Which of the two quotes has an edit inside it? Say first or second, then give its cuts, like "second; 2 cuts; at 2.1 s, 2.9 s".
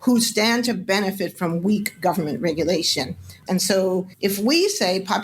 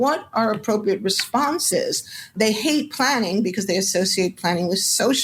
first; 1 cut; at 3.3 s